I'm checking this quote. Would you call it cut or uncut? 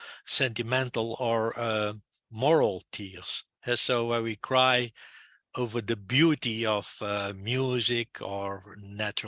uncut